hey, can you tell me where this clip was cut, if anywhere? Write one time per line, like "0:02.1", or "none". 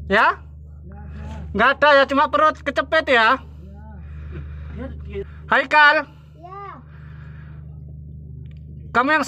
0:05.3